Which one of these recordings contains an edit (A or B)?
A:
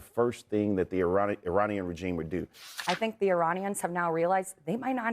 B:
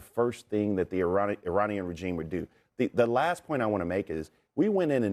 A